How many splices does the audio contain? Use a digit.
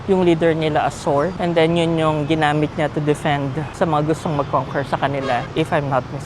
3